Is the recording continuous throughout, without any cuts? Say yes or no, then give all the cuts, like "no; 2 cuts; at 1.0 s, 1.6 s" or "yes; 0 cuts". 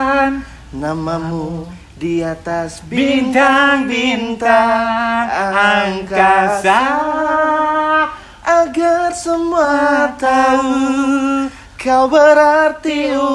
yes; 0 cuts